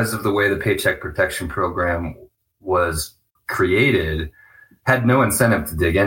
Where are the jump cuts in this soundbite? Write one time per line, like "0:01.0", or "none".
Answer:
0:03.3